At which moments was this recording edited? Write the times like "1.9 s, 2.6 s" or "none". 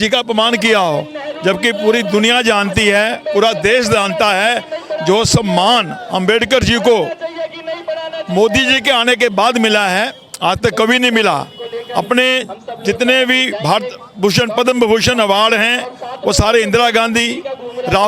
none